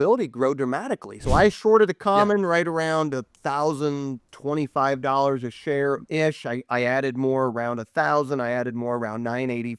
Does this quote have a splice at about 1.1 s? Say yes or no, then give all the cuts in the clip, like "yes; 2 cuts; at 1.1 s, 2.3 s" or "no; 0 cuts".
yes; 2 cuts; at 1.1 s, 6.0 s